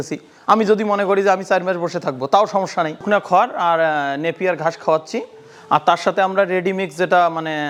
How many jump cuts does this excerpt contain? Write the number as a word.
zero